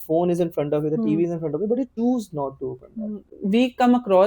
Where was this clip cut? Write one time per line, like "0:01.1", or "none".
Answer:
0:01.9
0:03.3